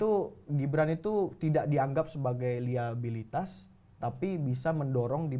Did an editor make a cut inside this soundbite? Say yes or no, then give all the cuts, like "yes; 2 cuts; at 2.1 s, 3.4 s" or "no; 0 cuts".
no; 0 cuts